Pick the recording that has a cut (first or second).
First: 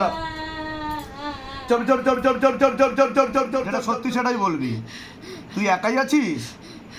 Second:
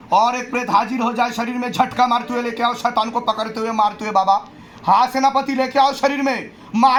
first